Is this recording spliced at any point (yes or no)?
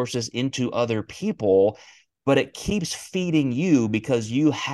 no